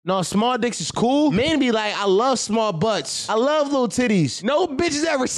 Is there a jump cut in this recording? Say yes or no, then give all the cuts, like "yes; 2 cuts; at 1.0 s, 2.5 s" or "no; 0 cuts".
yes; 3 cuts; at 1.3 s, 3.1 s, 4.4 s